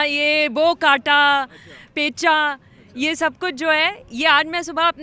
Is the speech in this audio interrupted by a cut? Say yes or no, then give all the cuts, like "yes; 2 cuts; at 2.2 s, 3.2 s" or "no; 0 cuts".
no; 0 cuts